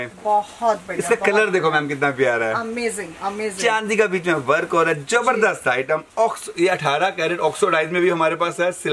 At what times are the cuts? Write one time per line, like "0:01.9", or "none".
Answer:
none